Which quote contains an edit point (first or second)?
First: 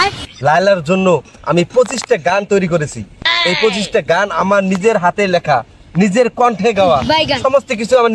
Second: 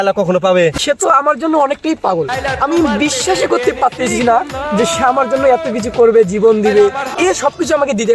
second